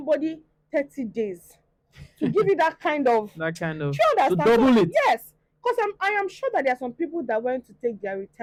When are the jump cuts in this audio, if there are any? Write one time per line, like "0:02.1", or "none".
none